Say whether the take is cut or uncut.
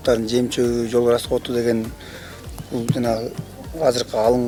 uncut